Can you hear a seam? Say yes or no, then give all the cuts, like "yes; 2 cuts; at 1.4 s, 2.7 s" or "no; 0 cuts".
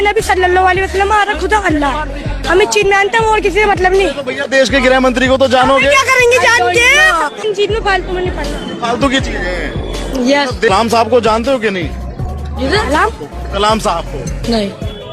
no; 0 cuts